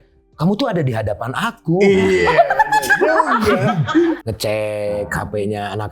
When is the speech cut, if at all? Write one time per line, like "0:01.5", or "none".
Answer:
0:04.2